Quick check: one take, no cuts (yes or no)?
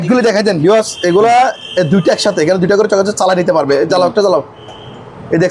yes